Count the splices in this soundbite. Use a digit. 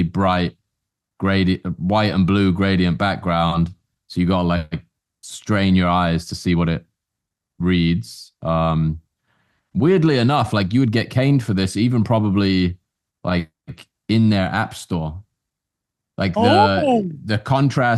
0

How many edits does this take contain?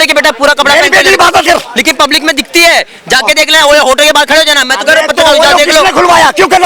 1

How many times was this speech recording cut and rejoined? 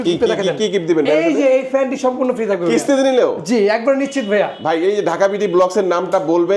0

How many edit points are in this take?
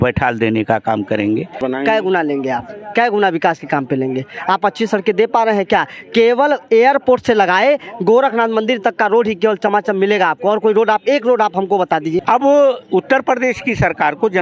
2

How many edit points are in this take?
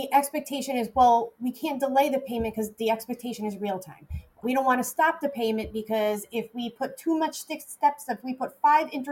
1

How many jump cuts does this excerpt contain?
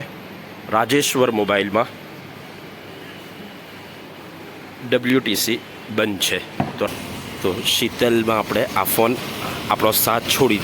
1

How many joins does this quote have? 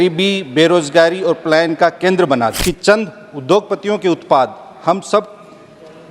1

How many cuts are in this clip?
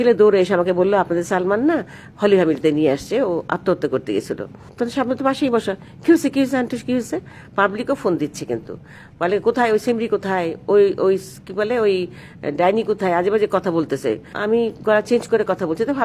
3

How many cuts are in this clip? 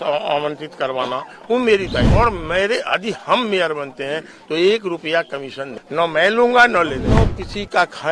3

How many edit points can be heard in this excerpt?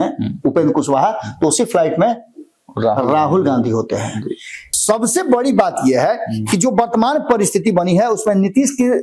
1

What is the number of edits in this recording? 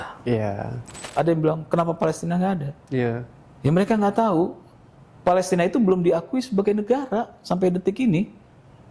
1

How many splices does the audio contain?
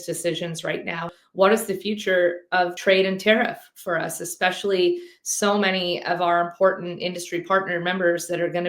2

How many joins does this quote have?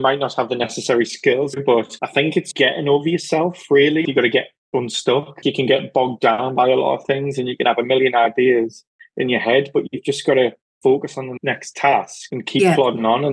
3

